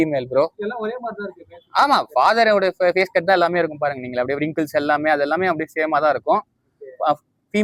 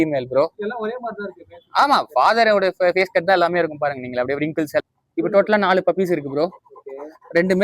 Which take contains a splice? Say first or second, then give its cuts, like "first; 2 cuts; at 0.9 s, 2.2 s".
second; 1 cut; at 4.8 s